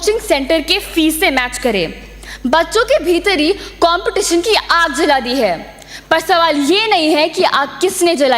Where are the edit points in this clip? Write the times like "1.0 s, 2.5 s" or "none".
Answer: none